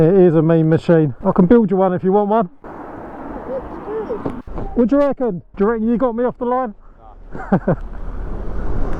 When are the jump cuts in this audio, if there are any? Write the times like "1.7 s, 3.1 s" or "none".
1.2 s, 4.4 s